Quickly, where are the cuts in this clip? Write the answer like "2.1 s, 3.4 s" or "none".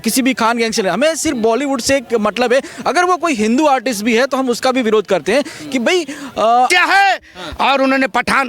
6.7 s